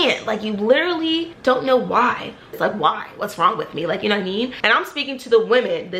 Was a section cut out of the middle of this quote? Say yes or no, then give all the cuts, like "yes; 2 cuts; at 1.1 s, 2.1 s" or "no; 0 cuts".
yes; 3 cuts; at 1.3 s, 2.6 s, 4.6 s